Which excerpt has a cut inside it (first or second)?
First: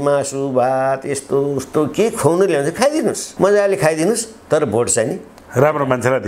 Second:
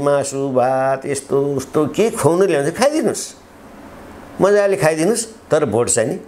first